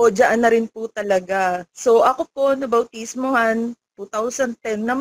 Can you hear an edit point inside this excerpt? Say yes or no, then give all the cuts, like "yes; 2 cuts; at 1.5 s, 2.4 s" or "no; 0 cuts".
yes; 1 cut; at 1.7 s